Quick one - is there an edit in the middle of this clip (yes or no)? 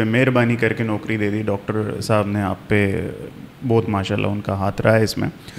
no